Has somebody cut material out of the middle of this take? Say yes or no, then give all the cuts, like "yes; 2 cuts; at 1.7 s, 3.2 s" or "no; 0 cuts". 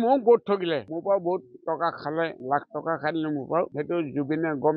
yes; 3 cuts; at 0.9 s, 2.4 s, 3.7 s